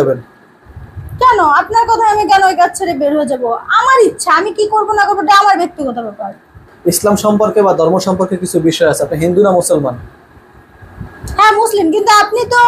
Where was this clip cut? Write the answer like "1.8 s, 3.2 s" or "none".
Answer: 6.7 s